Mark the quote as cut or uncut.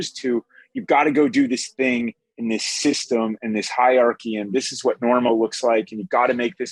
uncut